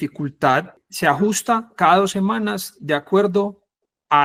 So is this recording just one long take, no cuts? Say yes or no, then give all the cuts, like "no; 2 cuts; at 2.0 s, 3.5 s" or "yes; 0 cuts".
yes; 0 cuts